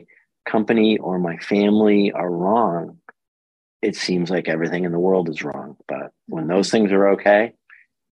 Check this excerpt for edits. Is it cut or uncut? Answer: uncut